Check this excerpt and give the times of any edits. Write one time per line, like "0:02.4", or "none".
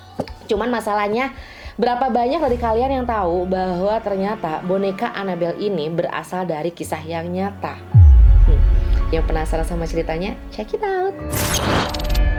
none

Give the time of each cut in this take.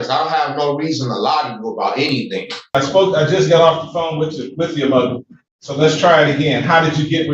0:02.8

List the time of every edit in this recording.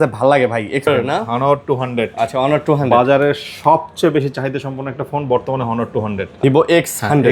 0:00.9
0:06.3

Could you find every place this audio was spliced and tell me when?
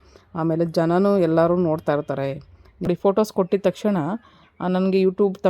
0:02.9

